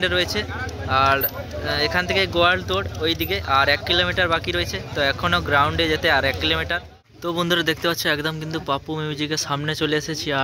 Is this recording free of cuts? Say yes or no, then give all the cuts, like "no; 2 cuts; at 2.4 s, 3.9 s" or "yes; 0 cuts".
no; 1 cut; at 7.0 s